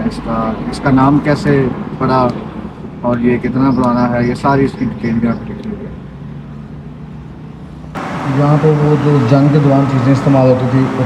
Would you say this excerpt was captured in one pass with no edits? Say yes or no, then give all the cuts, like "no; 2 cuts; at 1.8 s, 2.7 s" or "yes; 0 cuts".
no; 1 cut; at 7.9 s